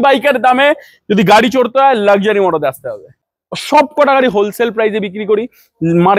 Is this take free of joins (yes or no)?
no